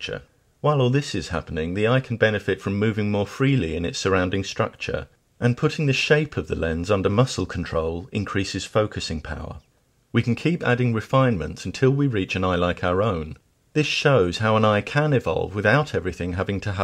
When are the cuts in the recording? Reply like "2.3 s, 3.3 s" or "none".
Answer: 4.1 s